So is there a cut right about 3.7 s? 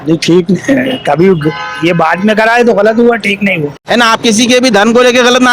yes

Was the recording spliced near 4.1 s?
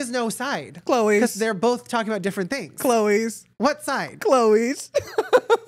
yes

